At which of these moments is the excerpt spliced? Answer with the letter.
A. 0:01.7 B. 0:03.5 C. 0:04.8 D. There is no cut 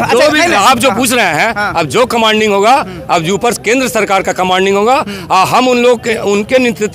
D